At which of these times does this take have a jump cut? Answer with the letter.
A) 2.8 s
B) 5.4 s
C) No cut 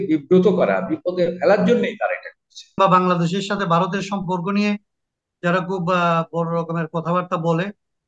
A